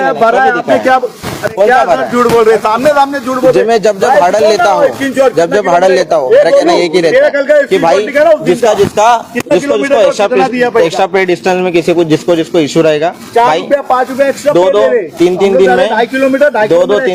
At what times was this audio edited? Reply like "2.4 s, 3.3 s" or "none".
none